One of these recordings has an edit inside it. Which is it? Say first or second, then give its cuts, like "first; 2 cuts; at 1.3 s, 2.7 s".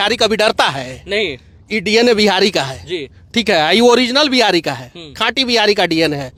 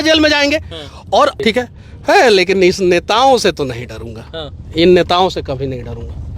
second; 1 cut; at 1.4 s